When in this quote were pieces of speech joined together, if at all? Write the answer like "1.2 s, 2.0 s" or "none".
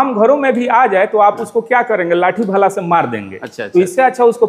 none